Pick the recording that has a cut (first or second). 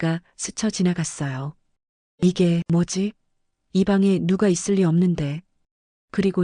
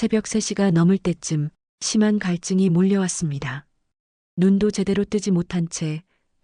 first